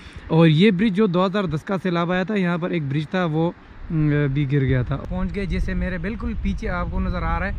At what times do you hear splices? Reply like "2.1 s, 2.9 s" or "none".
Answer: 5.0 s

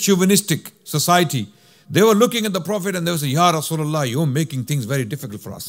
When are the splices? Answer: none

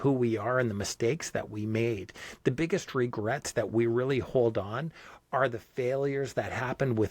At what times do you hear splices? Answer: none

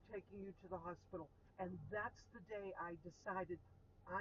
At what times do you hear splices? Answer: 1.4 s

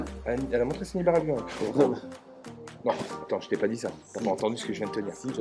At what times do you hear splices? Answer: none

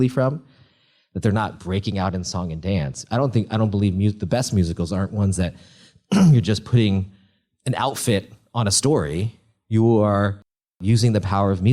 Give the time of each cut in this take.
10.8 s

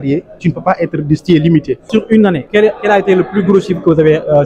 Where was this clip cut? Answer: 2.0 s

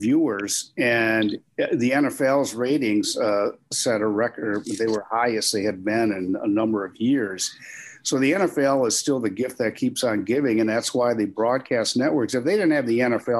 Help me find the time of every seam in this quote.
none

